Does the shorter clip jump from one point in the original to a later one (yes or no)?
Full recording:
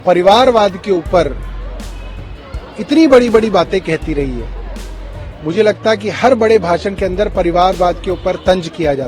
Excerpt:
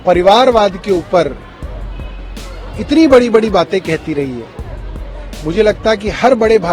no